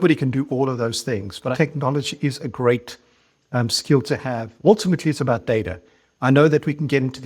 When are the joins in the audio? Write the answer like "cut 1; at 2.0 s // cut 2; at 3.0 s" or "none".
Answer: cut 1; at 1.5 s // cut 2; at 4.5 s